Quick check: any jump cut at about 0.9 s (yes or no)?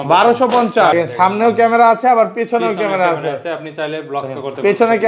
yes